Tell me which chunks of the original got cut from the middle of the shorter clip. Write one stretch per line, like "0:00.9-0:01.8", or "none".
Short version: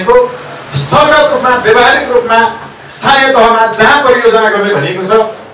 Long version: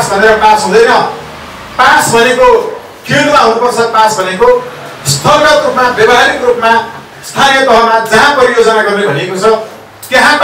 none